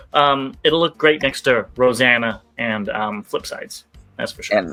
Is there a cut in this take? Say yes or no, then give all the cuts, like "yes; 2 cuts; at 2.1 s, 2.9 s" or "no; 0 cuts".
no; 0 cuts